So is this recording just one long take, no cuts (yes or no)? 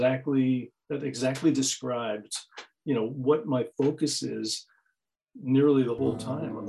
yes